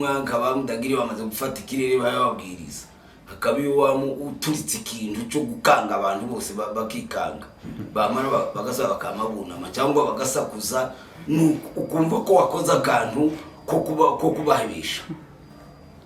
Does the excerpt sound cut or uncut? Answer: uncut